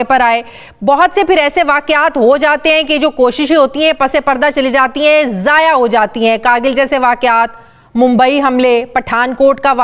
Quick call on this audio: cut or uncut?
uncut